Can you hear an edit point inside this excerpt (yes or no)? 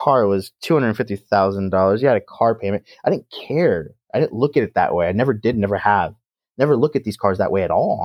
no